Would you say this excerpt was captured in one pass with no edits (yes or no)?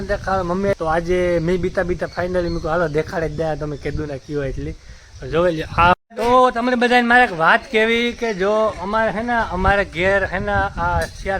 no